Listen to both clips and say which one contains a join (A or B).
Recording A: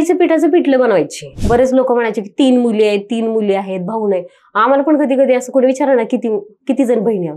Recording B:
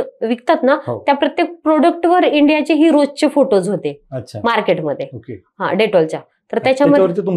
A